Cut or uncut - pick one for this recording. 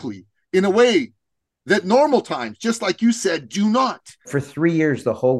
cut